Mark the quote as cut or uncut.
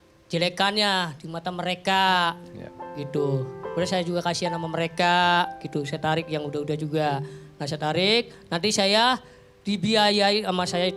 uncut